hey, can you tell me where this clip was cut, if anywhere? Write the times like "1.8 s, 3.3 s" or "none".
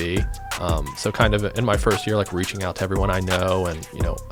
none